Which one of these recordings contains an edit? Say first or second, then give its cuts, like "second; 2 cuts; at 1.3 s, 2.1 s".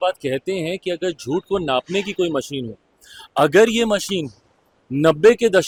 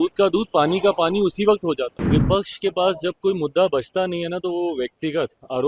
second; 1 cut; at 1.9 s